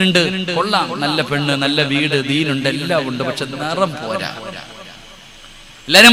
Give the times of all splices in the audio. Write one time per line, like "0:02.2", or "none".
none